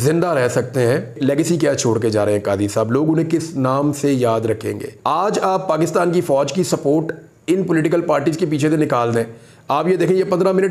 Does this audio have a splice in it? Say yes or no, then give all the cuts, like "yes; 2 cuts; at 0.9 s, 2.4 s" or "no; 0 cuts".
yes; 2 cuts; at 1.2 s, 4.9 s